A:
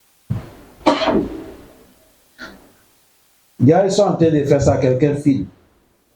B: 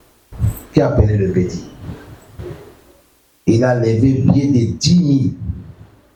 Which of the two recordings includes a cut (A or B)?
A